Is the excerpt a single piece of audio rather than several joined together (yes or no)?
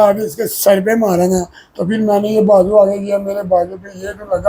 yes